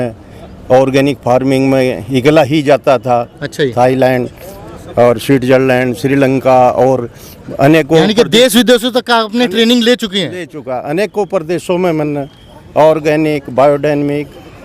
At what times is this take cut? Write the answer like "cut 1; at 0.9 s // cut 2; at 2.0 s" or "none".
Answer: none